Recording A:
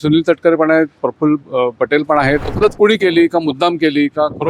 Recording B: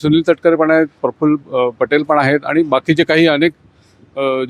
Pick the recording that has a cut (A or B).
A